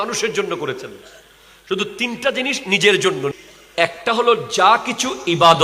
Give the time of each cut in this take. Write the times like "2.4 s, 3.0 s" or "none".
3.3 s